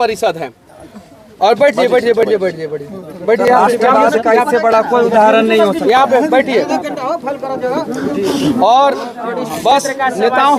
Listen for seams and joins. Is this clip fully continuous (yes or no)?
yes